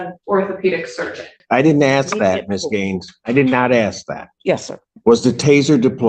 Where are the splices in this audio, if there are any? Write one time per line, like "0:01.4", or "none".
0:01.4